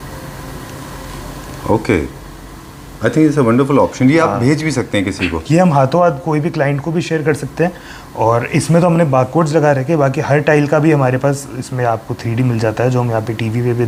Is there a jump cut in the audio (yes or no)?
no